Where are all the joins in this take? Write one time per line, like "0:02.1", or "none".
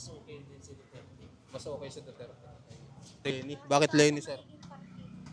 0:03.3